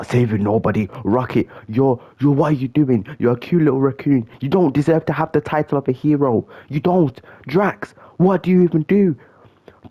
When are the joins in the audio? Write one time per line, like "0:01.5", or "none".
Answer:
none